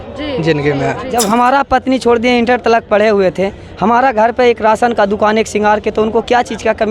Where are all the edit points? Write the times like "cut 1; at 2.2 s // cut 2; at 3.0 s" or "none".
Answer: cut 1; at 1.1 s